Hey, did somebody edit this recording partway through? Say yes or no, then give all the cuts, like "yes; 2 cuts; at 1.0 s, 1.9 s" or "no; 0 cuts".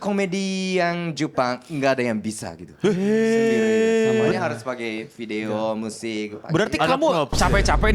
no; 0 cuts